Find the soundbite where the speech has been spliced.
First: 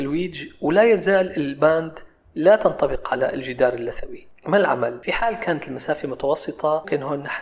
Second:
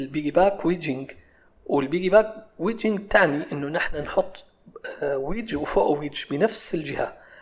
first; 1 cut; at 5.0 s

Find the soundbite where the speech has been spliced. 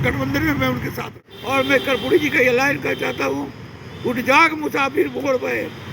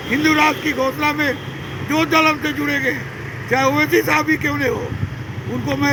first; 1 cut; at 1.0 s

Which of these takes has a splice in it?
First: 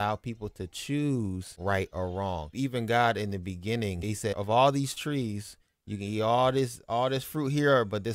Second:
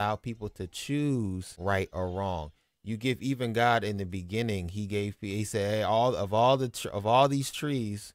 first; 2 cuts; at 2.5 s, 4.2 s

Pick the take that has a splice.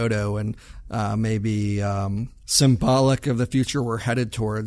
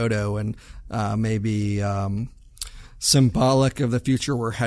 first; 1 cut; at 2.4 s

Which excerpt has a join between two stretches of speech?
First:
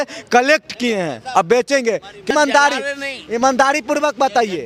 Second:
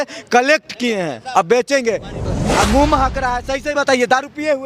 second; 1 cut; at 2.1 s

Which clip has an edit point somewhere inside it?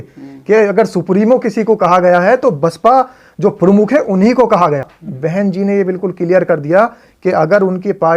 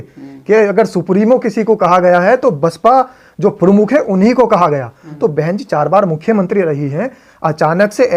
first; 1 cut; at 5.0 s

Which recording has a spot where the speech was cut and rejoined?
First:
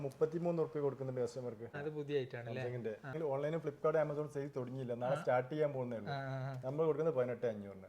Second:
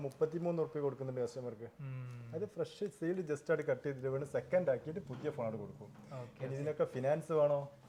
first; 2 cuts; at 1.8 s, 3.2 s

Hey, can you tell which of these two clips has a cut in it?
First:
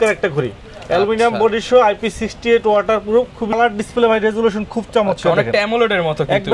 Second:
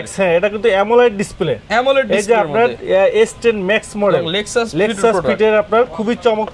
first; 1 cut; at 3.6 s

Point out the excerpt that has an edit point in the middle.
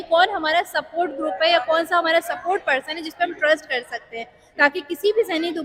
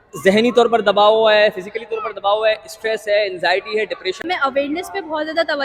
second; 1 cut; at 4.2 s

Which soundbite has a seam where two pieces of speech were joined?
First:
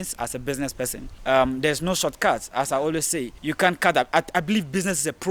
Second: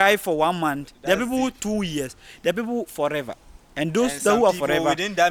first; 2 cuts; at 1.1 s, 3.3 s

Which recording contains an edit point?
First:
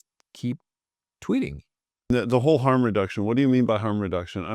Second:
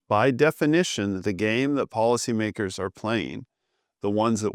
first; 1 cut; at 2.1 s

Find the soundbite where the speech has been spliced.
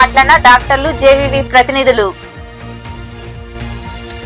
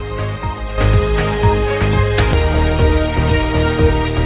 second; 1 cut; at 2.3 s

